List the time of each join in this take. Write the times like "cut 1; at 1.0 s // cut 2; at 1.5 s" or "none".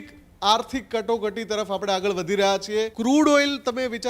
cut 1; at 2.9 s